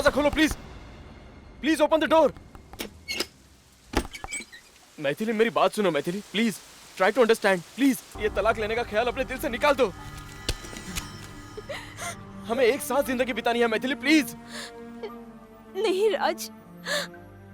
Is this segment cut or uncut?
cut